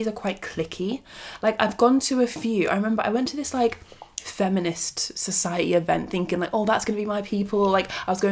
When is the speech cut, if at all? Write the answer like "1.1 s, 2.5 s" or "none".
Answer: none